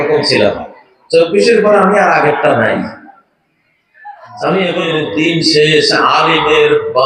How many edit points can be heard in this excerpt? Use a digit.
1